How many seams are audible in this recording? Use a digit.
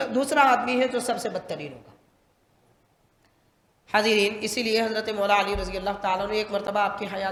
0